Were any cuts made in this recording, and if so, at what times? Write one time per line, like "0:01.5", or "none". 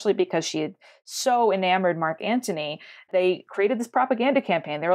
0:03.1